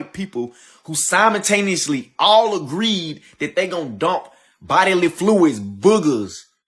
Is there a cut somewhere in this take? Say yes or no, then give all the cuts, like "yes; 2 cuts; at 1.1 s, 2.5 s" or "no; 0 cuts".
no; 0 cuts